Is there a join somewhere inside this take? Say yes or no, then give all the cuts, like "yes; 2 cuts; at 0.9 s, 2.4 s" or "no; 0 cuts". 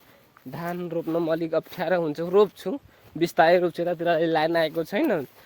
no; 0 cuts